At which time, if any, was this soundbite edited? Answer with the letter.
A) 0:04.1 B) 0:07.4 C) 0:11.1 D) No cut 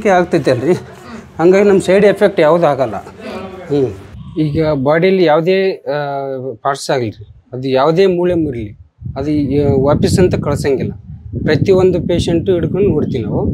D